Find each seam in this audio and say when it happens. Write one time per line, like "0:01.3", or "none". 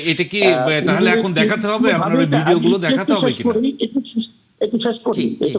none